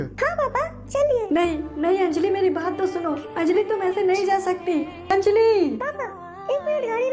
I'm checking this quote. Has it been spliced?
yes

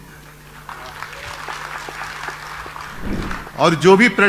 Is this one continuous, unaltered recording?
no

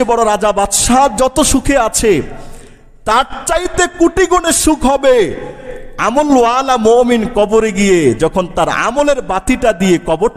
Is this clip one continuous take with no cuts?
yes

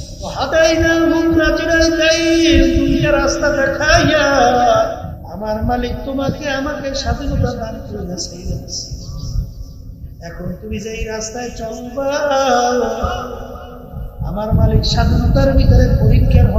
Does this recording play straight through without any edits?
no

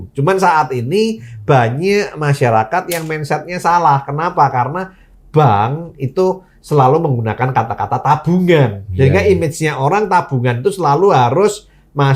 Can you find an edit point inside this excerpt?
no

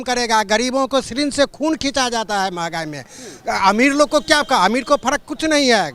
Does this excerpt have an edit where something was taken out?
no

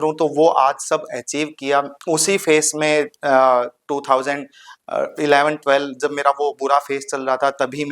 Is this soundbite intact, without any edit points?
yes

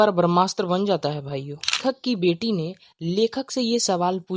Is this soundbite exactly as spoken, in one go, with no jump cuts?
no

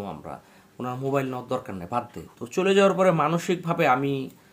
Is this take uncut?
no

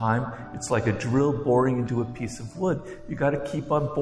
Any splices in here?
no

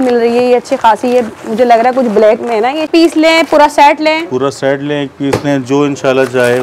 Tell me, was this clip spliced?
yes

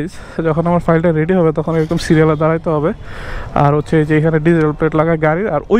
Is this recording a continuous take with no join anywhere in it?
yes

